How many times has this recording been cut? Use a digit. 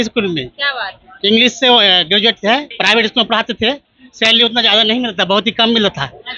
1